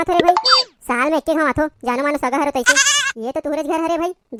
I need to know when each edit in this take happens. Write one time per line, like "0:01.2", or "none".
none